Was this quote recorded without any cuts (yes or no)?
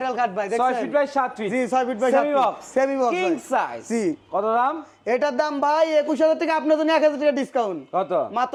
yes